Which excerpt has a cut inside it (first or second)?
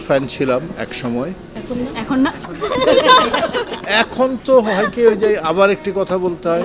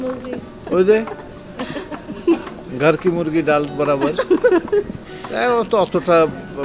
first